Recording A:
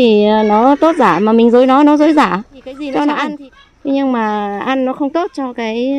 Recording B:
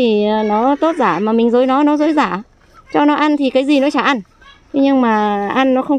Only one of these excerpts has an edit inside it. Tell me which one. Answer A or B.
A